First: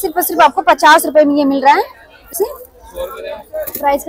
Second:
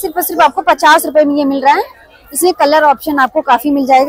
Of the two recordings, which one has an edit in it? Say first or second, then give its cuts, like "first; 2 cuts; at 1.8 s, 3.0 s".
first; 1 cut; at 2.3 s